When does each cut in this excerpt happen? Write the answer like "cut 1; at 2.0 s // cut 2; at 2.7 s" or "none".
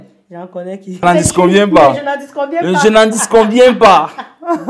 cut 1; at 1.0 s